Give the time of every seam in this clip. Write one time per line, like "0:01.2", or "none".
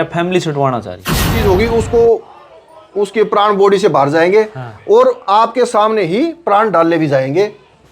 0:01.1